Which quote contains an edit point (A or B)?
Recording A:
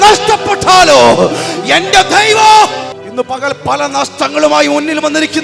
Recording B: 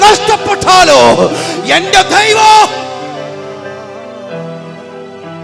A